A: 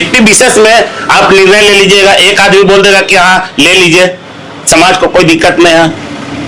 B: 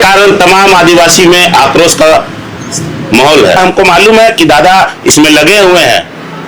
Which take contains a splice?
B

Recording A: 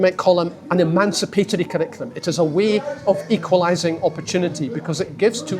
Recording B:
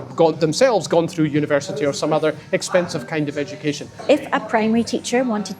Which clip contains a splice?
B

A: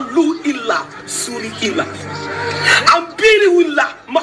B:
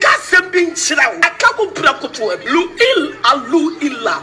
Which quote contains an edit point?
B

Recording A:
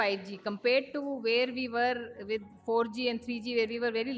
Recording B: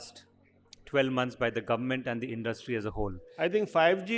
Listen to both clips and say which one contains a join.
B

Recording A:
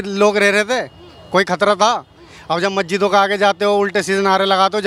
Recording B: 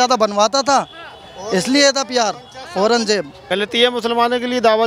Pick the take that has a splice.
B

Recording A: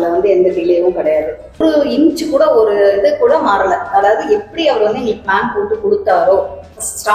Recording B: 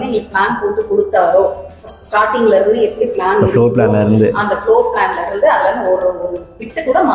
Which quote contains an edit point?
A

